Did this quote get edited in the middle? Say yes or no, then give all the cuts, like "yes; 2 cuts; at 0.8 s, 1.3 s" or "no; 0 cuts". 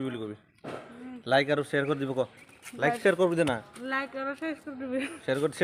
no; 0 cuts